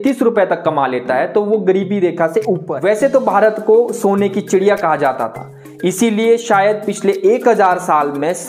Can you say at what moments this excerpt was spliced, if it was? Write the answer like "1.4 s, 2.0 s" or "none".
2.7 s